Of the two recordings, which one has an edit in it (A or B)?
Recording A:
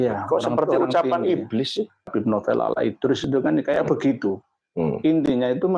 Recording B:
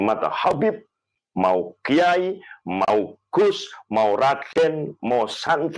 A